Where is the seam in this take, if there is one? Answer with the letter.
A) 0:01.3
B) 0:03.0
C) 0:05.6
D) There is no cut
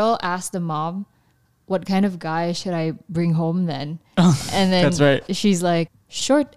D